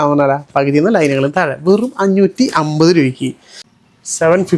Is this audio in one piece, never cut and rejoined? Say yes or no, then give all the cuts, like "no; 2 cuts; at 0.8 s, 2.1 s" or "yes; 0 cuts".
no; 1 cut; at 3.6 s